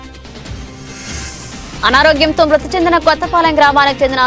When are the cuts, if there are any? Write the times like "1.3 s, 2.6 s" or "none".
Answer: 1.1 s